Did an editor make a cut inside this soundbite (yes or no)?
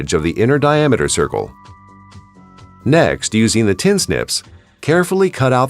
yes